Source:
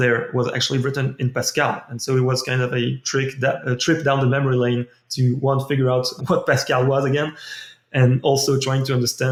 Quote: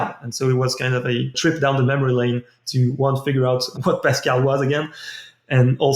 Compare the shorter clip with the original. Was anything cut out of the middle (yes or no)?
yes